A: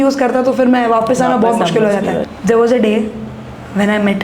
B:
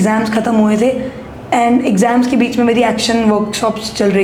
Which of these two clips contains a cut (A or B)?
A